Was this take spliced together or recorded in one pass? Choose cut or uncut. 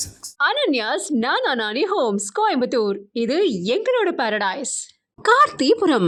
uncut